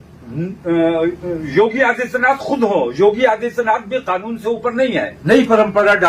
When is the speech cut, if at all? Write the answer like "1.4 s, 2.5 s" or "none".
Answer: 5.1 s